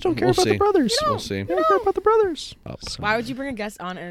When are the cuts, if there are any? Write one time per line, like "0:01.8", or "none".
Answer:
0:02.8